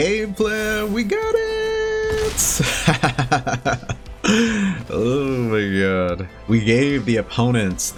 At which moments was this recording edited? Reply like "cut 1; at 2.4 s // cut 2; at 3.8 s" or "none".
none